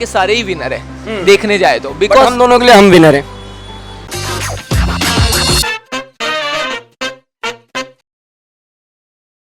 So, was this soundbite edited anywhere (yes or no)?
no